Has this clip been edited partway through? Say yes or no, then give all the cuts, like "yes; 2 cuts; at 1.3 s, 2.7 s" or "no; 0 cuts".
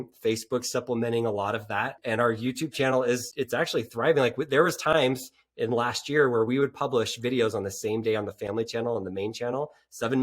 yes; 2 cuts; at 2.0 s, 3.3 s